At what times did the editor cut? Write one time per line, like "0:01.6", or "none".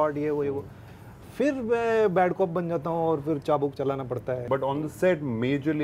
0:04.4